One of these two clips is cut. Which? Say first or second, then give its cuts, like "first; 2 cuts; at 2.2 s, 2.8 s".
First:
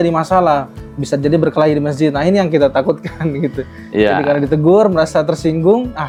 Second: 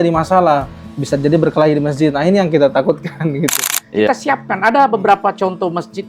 second; 1 cut; at 4.1 s